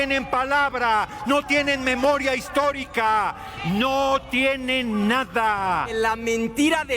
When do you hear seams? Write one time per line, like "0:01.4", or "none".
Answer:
0:05.9